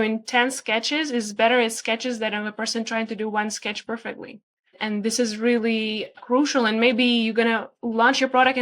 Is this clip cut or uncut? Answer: cut